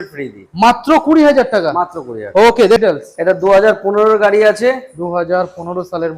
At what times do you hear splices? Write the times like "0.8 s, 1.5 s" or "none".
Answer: 2.8 s

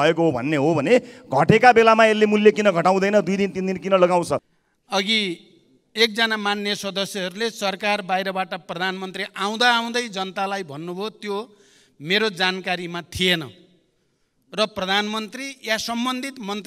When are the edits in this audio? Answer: 4.5 s

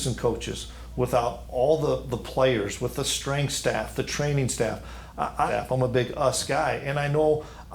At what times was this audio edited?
5.5 s

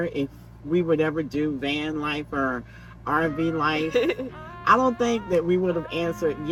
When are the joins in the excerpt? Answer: none

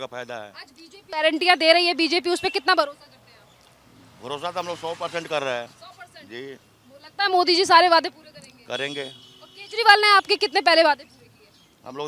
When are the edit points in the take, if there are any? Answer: 1.1 s

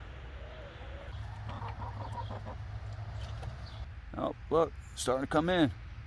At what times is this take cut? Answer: 1.2 s, 3.8 s

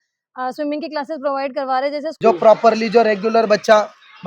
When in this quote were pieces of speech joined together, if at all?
2.1 s

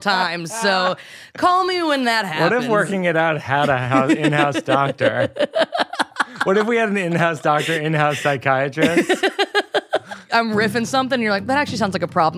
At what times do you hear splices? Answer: 10.2 s

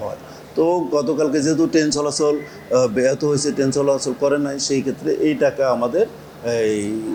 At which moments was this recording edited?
none

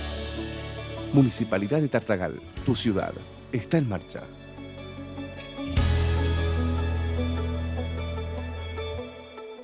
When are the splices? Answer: none

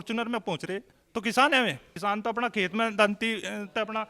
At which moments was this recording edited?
0.9 s, 1.9 s

